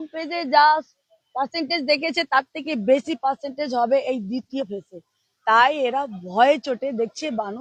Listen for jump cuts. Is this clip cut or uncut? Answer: uncut